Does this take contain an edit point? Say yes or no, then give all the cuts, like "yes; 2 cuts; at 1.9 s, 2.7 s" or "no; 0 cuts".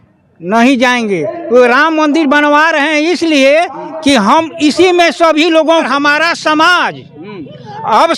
yes; 1 cut; at 5.9 s